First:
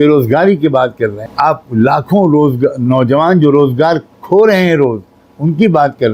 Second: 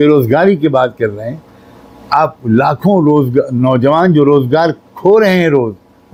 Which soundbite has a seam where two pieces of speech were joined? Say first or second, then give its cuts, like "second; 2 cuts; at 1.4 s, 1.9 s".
first; 1 cut; at 1.2 s